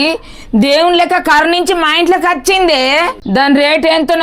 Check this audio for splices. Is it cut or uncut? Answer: cut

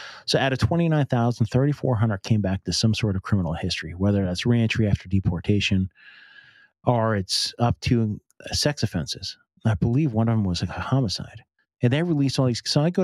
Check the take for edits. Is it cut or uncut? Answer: uncut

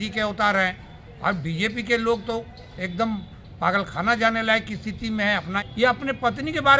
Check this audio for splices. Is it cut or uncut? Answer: cut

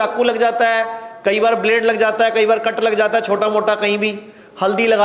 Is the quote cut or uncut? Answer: uncut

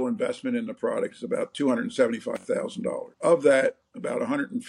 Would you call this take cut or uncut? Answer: cut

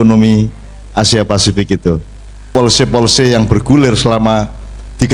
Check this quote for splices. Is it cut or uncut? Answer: cut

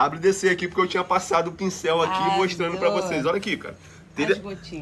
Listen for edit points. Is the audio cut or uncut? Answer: uncut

